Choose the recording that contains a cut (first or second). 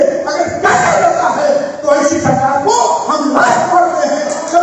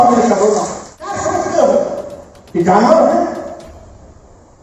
second